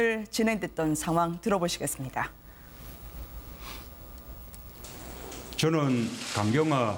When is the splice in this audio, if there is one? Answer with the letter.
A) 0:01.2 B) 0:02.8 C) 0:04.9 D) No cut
D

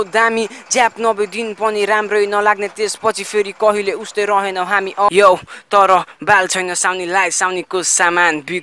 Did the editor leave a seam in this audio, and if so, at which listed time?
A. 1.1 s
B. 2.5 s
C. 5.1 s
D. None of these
C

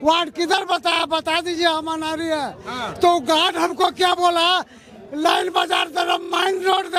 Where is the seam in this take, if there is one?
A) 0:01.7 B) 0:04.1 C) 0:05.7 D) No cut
D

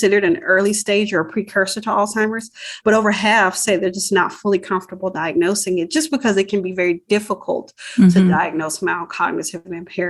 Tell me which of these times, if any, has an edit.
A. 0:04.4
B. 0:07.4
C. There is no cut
C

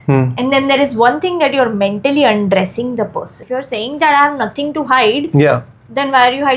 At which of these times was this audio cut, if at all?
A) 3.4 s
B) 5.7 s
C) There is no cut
A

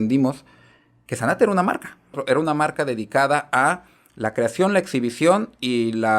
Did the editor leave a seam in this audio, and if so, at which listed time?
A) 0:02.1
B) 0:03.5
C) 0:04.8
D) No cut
A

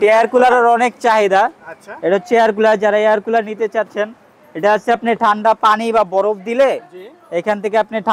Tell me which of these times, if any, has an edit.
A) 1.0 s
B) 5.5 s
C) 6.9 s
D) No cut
D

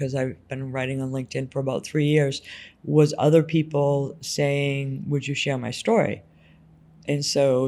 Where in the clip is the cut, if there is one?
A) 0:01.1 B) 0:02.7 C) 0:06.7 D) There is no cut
D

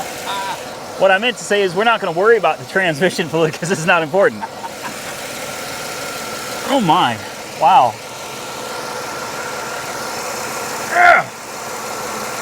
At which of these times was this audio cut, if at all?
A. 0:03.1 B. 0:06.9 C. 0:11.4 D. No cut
D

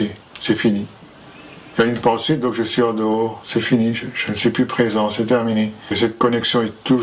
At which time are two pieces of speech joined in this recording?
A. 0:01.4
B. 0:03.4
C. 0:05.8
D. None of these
C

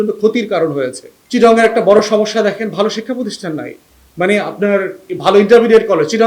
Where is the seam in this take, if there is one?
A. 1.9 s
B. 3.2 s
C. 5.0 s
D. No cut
C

